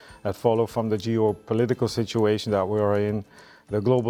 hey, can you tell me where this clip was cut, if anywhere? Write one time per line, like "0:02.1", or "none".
none